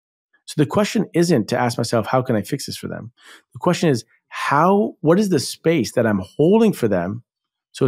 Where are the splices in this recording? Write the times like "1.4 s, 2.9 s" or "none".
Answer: none